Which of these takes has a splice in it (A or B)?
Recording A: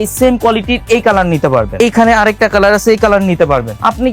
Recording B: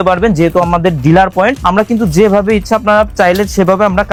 A